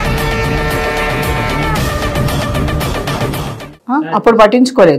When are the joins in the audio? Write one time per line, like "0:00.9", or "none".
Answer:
0:03.8